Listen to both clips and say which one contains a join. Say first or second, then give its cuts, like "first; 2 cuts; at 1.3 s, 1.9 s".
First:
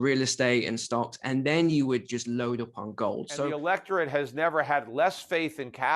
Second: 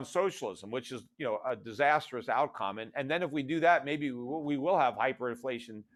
first; 1 cut; at 3.5 s